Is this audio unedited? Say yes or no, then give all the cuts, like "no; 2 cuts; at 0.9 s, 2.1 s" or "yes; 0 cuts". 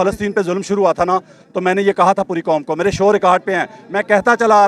yes; 0 cuts